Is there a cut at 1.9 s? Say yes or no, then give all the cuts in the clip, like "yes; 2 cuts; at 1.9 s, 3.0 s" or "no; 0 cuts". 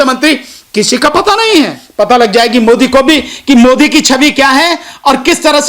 yes; 1 cut; at 1.9 s